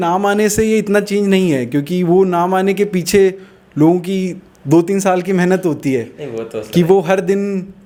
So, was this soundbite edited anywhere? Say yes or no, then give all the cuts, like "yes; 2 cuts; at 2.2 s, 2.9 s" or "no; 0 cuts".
no; 0 cuts